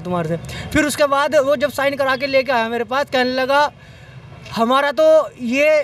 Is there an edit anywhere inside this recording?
no; 0 cuts

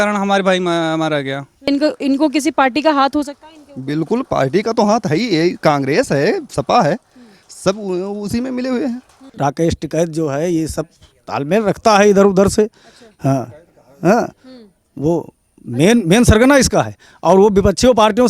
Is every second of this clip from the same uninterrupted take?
no; 2 cuts; at 1.7 s, 9.2 s

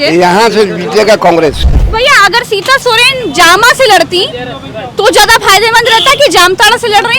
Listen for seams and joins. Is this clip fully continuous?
no; 1 cut; at 1.7 s

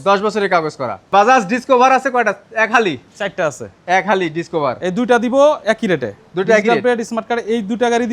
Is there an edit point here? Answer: no; 0 cuts

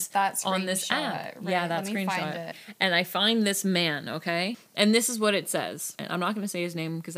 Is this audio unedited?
no; 3 cuts; at 2.6 s, 4.6 s, 6.0 s

